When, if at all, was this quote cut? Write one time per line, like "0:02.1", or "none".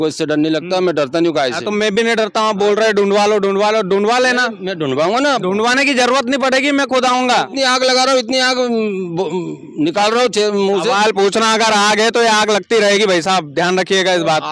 0:07.5

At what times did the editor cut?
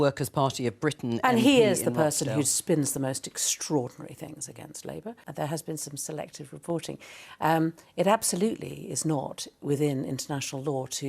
0:05.2

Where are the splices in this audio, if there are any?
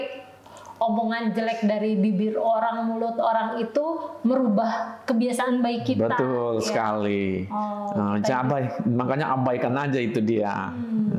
none

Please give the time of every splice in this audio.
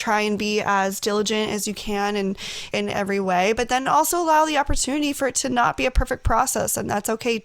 0:02.6

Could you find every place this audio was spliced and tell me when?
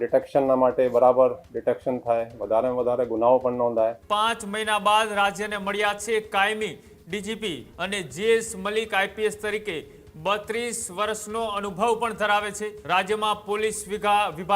0:04.0
0:07.7
0:12.7

